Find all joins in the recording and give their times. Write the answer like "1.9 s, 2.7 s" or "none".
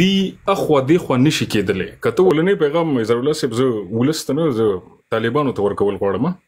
2.3 s